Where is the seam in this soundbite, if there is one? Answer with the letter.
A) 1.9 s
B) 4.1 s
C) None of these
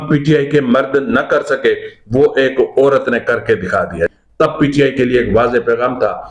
B